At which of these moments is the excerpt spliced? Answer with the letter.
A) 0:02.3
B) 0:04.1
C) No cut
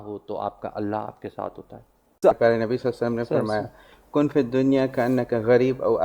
A